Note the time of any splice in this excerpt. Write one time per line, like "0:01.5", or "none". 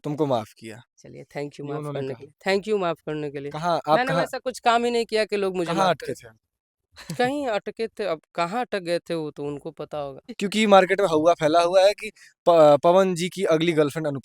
0:10.3